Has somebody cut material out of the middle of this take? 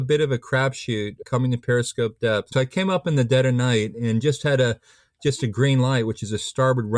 yes; 2 cuts; at 1.3 s, 2.5 s

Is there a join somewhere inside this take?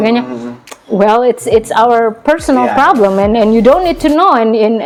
no; 0 cuts

